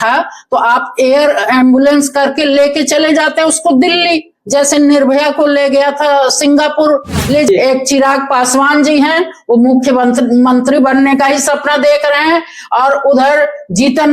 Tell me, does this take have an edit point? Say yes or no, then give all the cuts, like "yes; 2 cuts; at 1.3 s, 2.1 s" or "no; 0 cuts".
yes; 1 cut; at 7.5 s